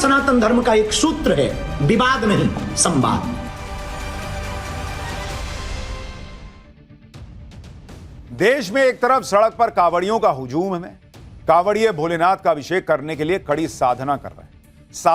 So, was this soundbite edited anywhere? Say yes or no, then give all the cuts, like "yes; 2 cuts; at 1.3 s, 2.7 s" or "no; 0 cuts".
no; 0 cuts